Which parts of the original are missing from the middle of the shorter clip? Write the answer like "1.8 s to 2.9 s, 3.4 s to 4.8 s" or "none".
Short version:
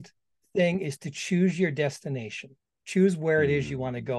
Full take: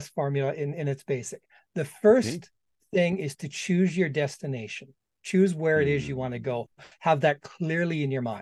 none